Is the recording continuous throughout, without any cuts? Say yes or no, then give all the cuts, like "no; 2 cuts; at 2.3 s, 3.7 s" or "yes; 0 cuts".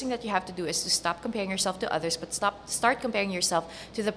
yes; 0 cuts